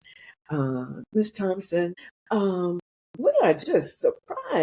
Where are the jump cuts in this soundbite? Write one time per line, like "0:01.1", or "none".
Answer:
0:01.1
0:02.1
0:03.6

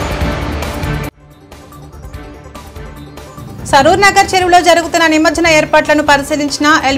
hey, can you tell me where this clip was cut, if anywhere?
none

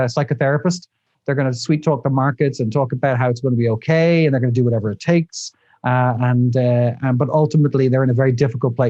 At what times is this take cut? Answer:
none

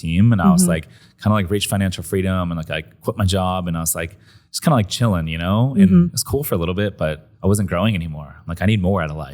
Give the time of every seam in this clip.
0:07.3

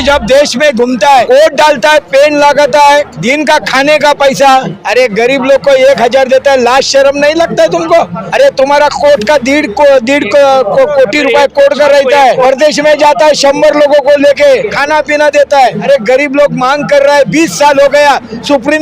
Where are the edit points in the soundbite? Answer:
0:01.2
0:03.1
0:04.8
0:08.2
0:12.4
0:14.8
0:15.8

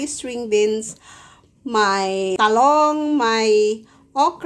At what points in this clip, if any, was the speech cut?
0:02.4

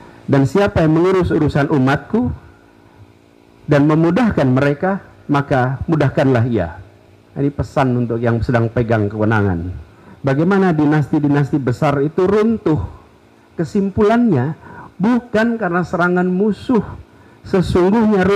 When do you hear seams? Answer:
0:09.8

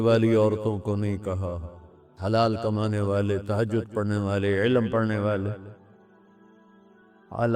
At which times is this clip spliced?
none

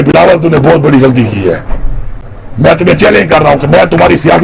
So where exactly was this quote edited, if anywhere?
none

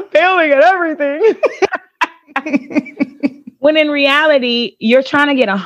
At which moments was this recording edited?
none

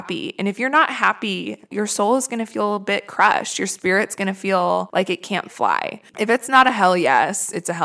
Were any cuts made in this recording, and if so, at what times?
0:04.9
0:06.0

